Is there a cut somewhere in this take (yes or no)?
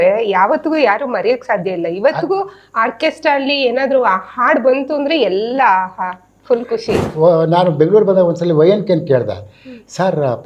yes